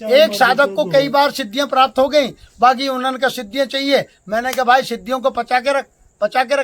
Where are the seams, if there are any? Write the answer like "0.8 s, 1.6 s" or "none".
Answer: none